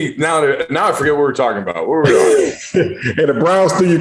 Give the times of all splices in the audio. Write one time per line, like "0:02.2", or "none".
none